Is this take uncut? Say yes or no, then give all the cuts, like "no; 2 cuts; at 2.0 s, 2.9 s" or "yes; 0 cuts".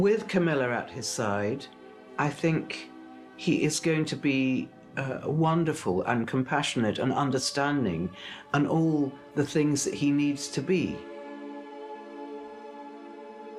yes; 0 cuts